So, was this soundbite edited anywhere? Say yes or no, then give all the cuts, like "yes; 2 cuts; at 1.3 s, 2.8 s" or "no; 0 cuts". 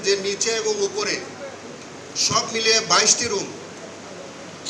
no; 0 cuts